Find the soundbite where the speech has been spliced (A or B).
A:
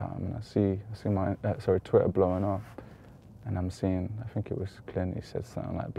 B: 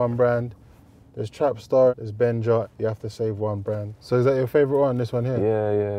B